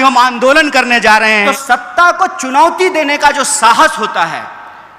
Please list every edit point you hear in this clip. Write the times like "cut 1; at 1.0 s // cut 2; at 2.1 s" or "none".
cut 1; at 1.3 s

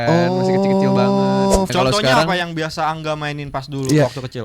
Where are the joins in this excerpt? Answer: cut 1; at 1.7 s

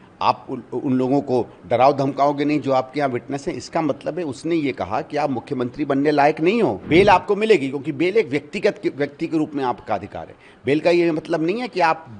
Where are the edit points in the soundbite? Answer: cut 1; at 6.8 s

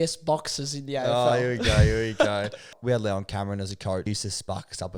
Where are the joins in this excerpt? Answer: cut 1; at 2.7 s // cut 2; at 4.1 s

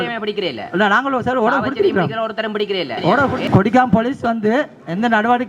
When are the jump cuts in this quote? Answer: cut 1; at 3.4 s

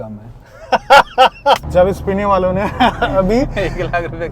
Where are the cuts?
cut 1; at 1.6 s

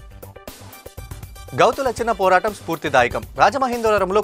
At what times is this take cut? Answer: none

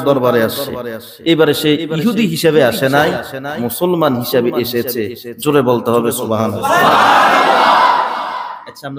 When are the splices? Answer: none

